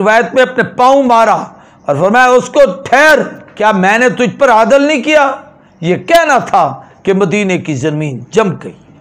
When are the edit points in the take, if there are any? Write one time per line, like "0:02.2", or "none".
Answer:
0:03.5